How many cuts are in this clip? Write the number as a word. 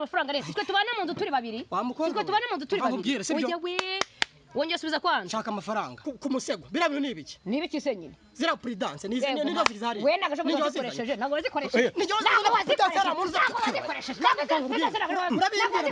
one